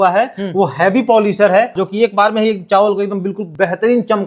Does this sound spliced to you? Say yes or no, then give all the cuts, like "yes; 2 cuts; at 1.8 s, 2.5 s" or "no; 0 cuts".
yes; 2 cuts; at 1.8 s, 3.4 s